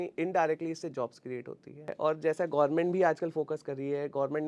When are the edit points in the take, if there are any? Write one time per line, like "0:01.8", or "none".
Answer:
0:01.9